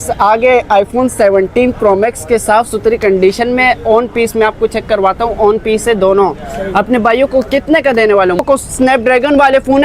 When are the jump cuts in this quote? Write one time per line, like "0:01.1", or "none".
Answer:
0:08.4